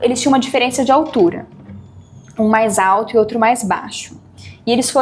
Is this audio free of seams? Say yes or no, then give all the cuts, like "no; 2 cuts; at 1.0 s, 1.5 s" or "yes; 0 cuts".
yes; 0 cuts